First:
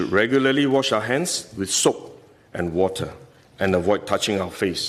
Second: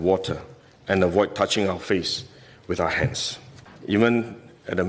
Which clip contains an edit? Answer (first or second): second